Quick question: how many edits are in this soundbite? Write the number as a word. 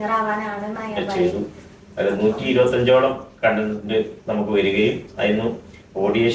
one